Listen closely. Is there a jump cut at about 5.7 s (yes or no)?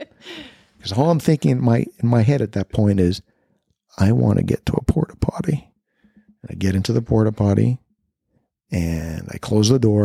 yes